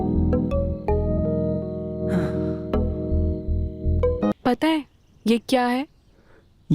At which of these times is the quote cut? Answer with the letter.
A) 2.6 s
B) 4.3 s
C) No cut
B